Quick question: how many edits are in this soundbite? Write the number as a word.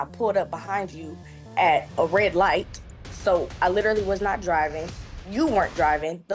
zero